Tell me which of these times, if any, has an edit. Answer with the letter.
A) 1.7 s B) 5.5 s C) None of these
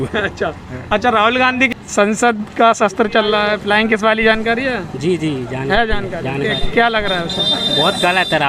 A